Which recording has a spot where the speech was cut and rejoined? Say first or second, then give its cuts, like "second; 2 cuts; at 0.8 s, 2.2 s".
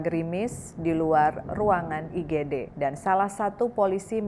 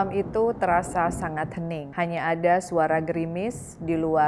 first; 1 cut; at 2.7 s